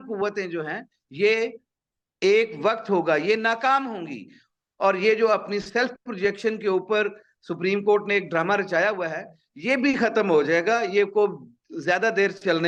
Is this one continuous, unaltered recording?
yes; 0 cuts

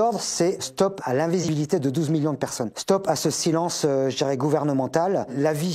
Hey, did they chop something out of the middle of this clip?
yes; 1 cut; at 1.4 s

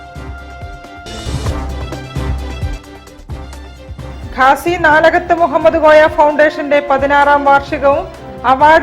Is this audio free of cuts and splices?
yes; 0 cuts

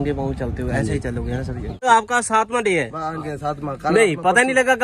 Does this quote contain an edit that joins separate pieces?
yes; 1 cut; at 1.9 s

